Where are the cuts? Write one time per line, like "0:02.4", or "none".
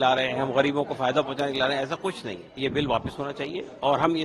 0:02.6